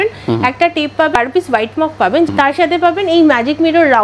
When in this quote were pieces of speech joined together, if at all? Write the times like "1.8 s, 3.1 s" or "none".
1.2 s, 2.3 s